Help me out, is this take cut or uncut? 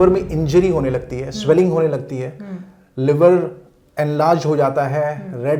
uncut